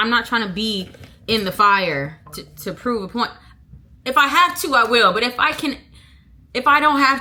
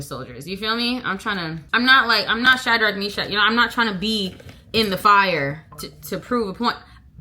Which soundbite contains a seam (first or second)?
second